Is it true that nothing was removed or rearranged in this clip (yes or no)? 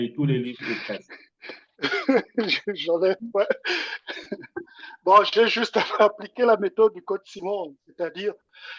yes